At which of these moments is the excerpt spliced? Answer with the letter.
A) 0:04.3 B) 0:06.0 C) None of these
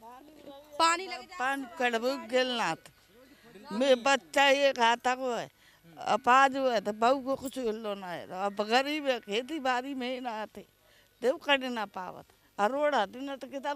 C